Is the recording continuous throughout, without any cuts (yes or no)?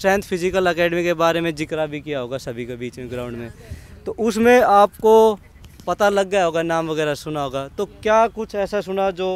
yes